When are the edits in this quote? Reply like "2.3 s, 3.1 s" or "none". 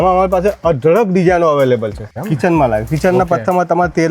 2.1 s